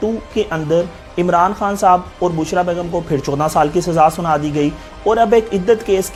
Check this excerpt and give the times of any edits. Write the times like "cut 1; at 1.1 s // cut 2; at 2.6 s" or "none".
none